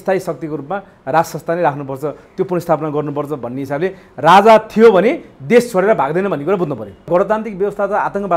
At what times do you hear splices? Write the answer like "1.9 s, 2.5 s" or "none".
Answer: 7.1 s